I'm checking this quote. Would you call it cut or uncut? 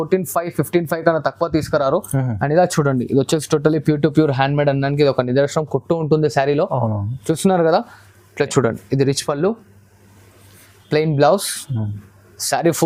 uncut